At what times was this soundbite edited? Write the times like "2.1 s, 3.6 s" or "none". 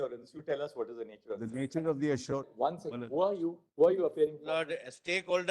2.5 s